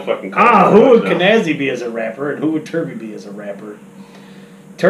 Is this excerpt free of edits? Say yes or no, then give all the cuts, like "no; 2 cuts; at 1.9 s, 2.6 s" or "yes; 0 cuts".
yes; 0 cuts